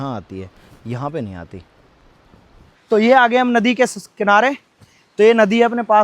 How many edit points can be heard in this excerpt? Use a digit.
1